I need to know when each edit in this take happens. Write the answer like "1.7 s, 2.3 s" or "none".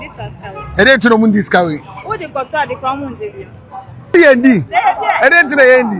4.1 s